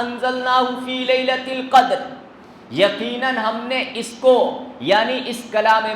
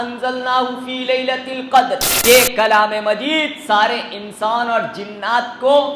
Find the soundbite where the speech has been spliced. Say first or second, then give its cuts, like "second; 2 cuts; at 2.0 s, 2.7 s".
second; 1 cut; at 2.1 s